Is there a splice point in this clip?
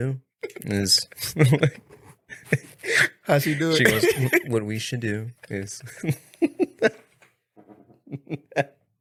no; 0 cuts

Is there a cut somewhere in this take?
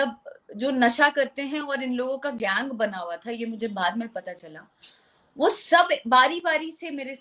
no; 0 cuts

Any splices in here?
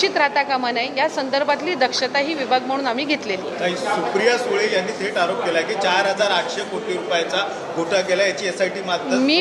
no; 0 cuts

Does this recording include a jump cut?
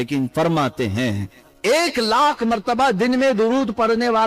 no; 0 cuts

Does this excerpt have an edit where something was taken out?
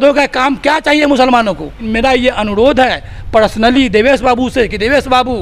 yes; 1 cut; at 1.8 s

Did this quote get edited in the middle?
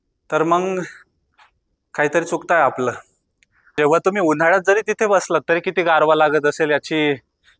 yes; 1 cut; at 3.7 s

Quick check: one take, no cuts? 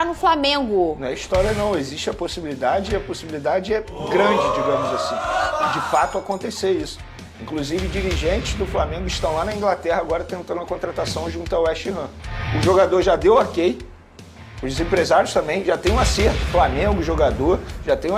yes; 0 cuts

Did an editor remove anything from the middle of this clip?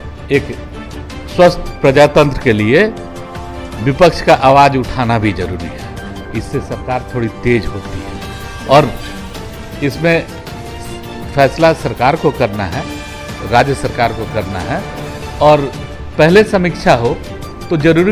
no; 0 cuts

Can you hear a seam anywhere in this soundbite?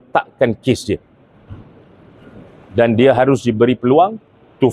no; 0 cuts

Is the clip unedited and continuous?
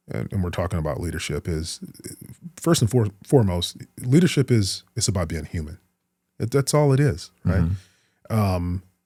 yes; 0 cuts

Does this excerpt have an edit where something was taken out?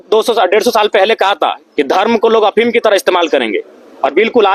no; 0 cuts

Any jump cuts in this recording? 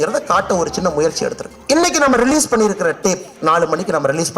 yes; 1 cut; at 1.5 s

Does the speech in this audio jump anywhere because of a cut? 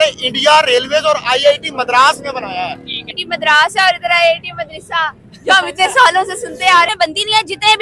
yes; 2 cuts; at 3.2 s, 6.9 s

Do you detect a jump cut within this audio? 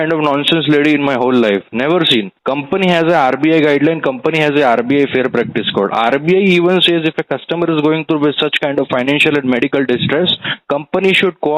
yes; 1 cut; at 2.3 s

